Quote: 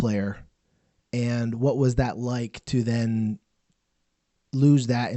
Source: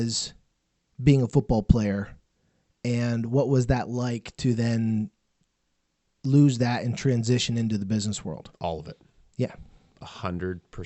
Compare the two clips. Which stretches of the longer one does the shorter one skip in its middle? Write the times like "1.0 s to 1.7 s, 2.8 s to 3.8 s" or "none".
none